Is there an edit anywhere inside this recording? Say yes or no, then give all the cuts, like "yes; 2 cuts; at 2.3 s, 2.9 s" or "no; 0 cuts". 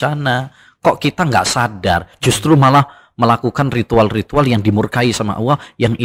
no; 0 cuts